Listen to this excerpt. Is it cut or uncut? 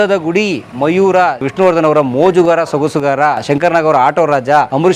cut